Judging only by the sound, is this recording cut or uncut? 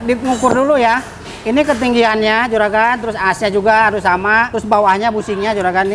cut